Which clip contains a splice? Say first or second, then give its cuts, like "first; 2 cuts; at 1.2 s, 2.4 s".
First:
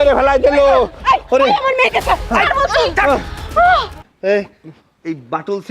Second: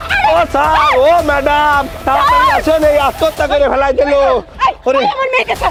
first; 1 cut; at 4.0 s